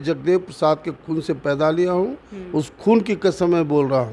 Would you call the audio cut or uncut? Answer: uncut